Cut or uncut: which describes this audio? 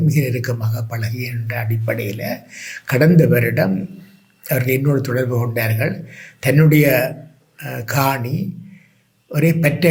uncut